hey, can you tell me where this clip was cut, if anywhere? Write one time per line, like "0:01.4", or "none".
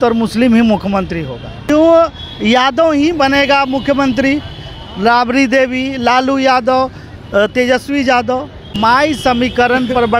0:01.7
0:08.6